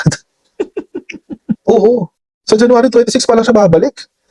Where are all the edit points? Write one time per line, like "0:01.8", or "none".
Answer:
0:01.5